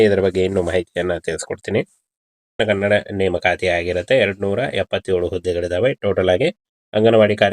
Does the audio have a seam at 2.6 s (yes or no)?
yes